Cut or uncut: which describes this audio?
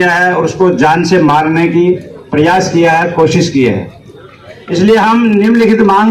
uncut